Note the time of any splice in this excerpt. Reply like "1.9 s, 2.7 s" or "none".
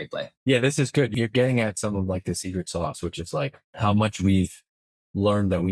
1.1 s, 3.6 s